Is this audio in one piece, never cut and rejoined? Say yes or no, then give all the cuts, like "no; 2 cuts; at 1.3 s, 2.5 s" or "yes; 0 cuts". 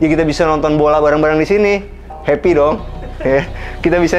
no; 1 cut; at 2.1 s